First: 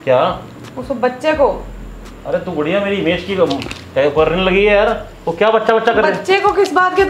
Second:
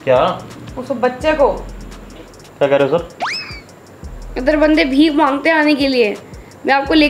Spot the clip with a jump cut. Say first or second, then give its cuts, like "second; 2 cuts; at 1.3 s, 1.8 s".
second; 1 cut; at 2.1 s